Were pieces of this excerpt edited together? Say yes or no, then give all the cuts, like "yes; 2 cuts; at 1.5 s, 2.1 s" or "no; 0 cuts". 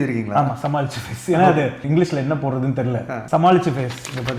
yes; 2 cuts; at 1.8 s, 3.2 s